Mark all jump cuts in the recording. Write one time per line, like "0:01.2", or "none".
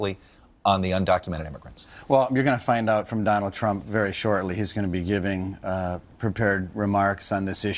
0:02.8